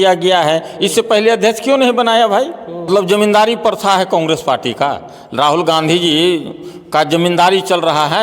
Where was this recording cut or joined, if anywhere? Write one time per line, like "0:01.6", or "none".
0:02.9